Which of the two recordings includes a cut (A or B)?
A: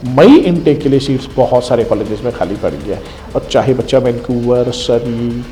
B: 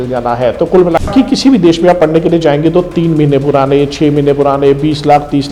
B